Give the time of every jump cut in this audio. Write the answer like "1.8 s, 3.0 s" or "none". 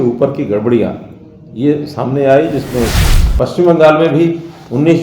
2.9 s